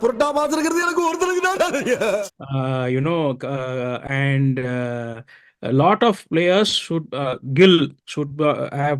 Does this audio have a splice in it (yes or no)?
no